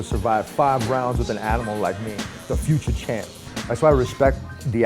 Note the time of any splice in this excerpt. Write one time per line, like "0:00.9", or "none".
0:03.5